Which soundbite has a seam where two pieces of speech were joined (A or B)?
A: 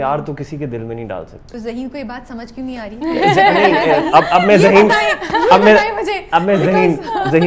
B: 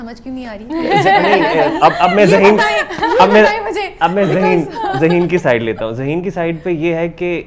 A